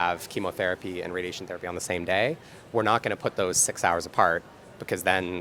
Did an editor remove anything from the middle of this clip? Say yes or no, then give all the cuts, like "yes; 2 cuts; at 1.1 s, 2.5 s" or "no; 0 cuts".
no; 0 cuts